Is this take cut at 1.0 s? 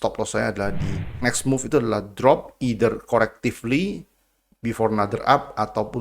yes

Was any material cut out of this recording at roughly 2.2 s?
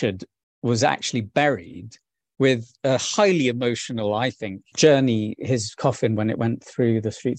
yes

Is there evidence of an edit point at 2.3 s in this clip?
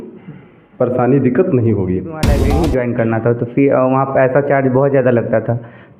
yes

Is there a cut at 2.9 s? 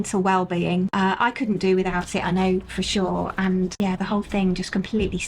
no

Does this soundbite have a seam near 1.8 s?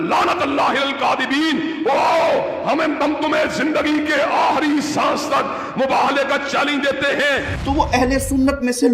no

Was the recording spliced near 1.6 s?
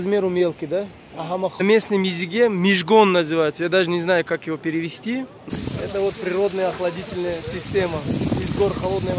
yes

